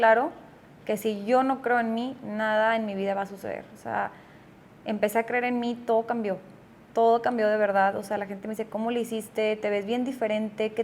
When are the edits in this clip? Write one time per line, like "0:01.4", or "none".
none